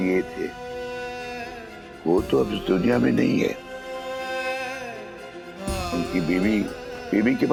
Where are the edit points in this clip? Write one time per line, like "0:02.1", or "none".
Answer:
none